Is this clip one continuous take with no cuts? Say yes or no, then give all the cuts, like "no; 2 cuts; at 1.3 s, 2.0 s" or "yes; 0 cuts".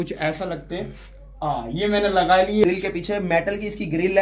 no; 1 cut; at 2.6 s